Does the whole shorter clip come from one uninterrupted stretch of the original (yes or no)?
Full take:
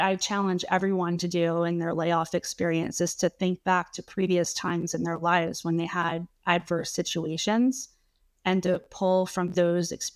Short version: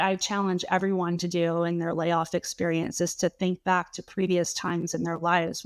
yes